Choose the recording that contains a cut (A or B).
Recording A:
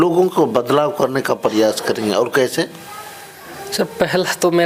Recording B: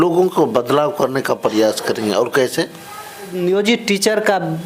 B